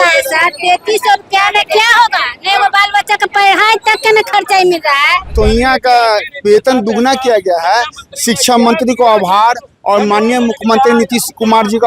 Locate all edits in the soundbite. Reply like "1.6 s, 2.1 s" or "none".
5.3 s